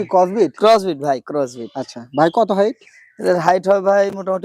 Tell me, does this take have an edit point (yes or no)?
no